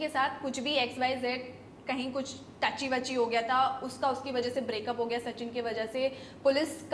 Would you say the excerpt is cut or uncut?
uncut